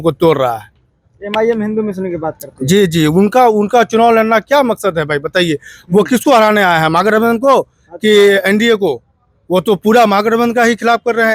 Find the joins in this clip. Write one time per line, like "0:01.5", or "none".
none